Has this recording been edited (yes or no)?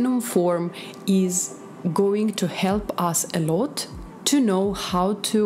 no